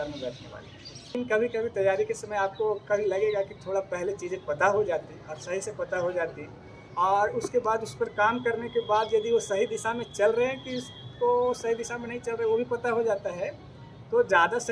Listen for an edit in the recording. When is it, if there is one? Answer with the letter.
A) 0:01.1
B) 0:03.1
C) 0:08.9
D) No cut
A